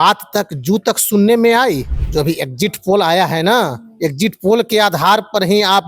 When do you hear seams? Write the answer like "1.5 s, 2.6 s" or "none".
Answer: 1.9 s